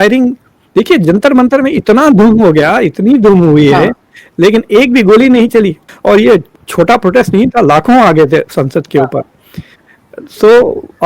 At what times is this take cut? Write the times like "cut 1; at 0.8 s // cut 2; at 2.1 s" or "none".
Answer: cut 1; at 5.9 s